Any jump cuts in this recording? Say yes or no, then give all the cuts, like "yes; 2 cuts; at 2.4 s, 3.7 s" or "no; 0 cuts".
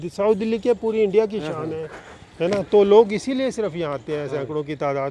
no; 0 cuts